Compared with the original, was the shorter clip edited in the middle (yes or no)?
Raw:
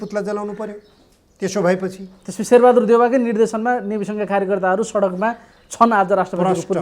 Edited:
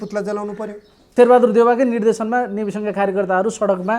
yes